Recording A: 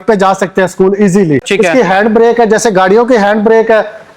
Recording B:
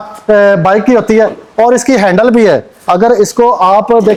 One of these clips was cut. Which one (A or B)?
A